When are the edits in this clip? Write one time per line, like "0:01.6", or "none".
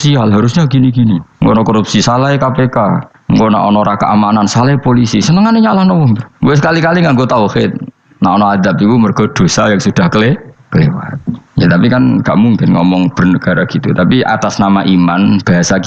0:01.3
0:03.1